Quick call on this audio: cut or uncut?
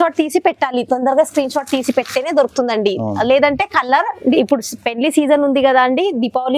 cut